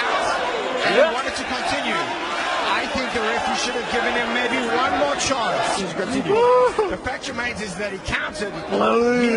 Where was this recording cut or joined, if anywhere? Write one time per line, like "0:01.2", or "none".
none